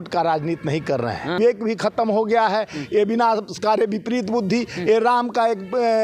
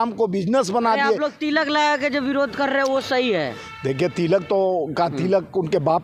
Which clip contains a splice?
first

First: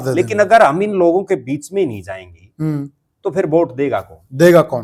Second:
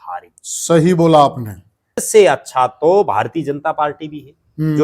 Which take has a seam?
second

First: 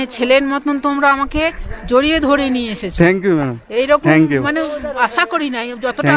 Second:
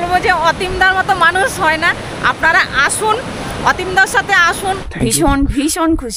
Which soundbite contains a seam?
second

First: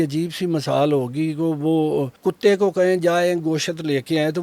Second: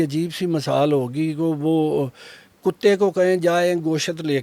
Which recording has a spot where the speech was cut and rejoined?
first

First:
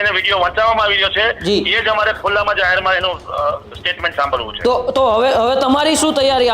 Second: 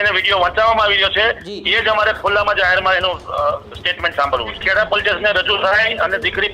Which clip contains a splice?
second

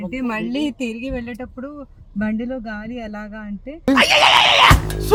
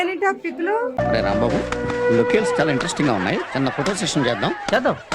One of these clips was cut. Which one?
second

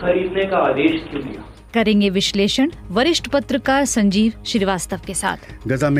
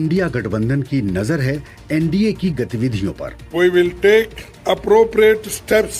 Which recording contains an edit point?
first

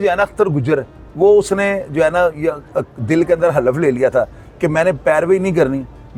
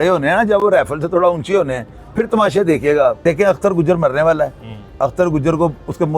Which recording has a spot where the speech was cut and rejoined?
second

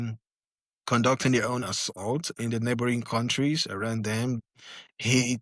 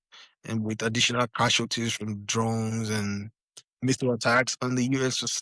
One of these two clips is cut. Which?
first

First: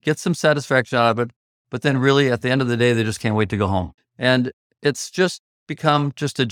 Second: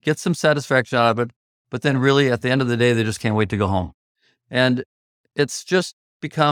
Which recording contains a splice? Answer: first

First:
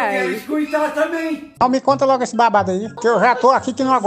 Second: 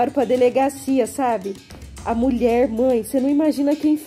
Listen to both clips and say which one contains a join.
first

